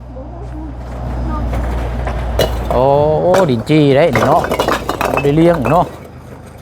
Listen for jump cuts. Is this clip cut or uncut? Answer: cut